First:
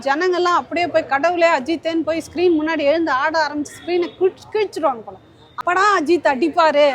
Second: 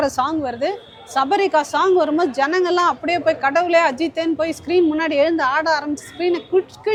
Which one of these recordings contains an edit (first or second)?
first